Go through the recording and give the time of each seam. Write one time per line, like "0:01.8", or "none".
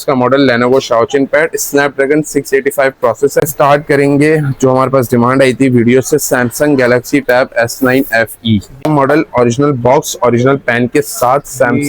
0:03.4
0:08.9